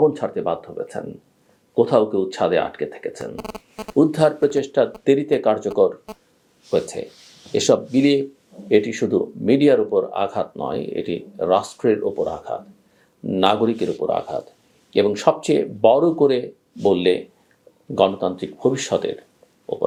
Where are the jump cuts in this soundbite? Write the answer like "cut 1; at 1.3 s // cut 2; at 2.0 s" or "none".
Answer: none